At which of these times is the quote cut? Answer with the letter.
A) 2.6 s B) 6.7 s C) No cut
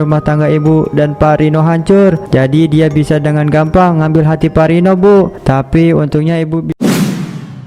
B